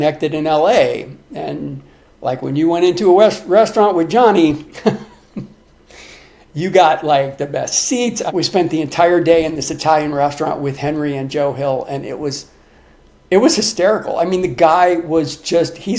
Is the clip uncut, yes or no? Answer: no